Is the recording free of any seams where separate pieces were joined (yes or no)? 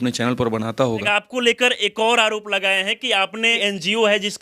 no